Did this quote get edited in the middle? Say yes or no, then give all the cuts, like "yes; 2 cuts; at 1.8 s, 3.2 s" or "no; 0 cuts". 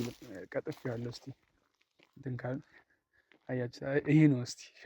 no; 0 cuts